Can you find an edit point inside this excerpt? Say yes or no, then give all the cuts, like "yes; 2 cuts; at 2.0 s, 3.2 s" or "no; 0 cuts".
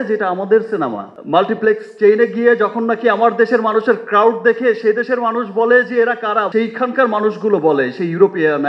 yes; 1 cut; at 1.1 s